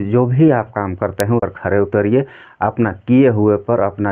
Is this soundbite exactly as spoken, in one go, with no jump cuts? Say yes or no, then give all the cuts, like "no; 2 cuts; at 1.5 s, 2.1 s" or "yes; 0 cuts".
no; 1 cut; at 1.5 s